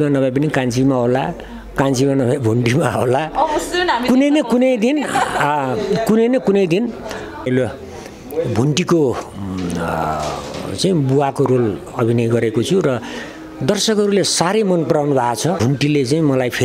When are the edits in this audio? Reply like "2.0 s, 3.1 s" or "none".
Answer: 7.5 s, 15.6 s